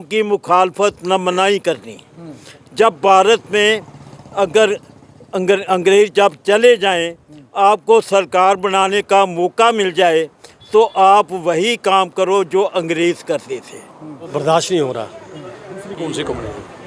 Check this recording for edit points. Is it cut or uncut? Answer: cut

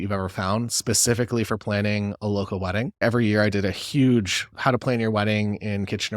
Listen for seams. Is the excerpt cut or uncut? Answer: cut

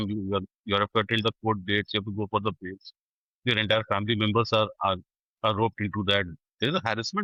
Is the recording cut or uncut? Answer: uncut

